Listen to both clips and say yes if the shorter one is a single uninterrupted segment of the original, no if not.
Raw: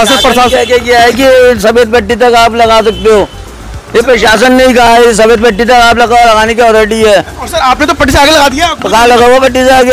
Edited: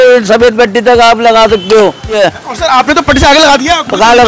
no